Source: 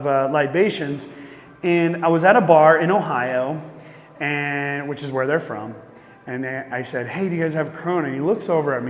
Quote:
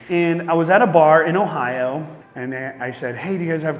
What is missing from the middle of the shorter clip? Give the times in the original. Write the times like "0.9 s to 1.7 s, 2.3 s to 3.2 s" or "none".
3.8 s to 6.1 s